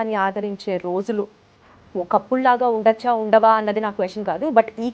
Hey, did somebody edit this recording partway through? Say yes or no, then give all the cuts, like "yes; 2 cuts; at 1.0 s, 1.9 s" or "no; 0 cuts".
no; 0 cuts